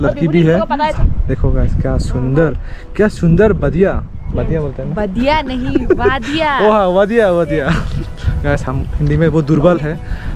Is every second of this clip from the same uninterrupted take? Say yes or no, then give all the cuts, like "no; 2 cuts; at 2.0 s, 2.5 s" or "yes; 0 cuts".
no; 1 cut; at 1.0 s